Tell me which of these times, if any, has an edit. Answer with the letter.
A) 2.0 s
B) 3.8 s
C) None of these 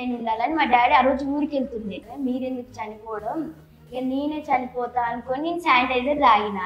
A